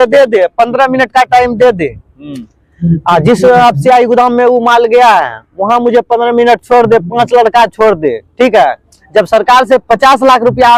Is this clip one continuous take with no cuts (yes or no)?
yes